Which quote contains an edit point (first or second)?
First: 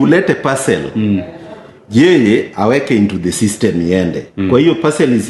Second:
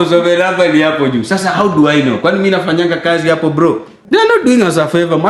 second